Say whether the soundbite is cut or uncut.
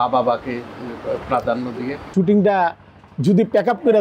cut